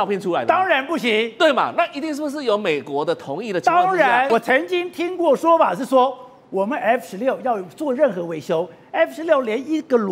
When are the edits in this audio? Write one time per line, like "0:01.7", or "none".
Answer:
0:04.3